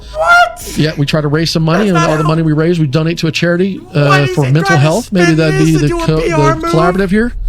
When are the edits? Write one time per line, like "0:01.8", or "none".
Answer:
none